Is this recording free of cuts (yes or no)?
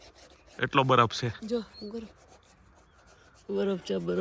yes